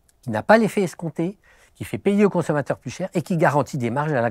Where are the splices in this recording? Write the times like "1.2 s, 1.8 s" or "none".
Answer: none